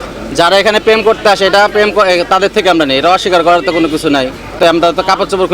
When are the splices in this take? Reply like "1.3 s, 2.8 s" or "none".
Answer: 4.6 s